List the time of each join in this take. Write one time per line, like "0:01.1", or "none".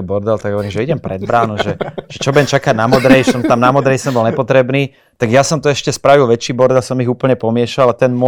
none